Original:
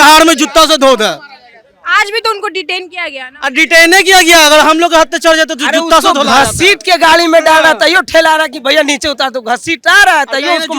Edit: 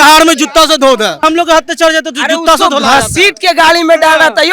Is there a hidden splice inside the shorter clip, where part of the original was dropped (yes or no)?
yes